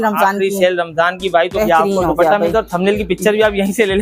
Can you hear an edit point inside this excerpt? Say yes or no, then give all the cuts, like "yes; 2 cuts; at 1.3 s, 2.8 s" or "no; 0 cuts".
yes; 1 cut; at 1.5 s